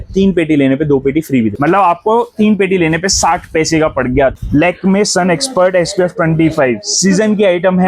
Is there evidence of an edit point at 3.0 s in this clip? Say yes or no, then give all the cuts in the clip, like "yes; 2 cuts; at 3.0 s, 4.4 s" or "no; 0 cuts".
no; 2 cuts; at 1.5 s, 4.4 s